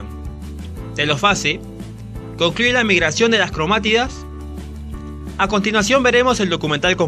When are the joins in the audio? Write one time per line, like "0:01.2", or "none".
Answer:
0:05.3